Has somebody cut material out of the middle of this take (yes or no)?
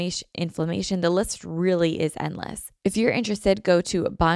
yes